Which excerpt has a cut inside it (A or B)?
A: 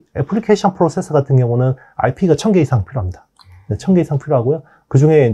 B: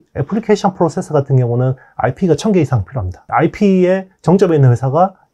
B